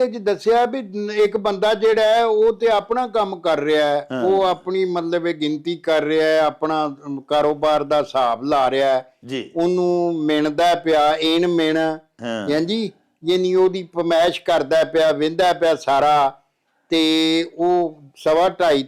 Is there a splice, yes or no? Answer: no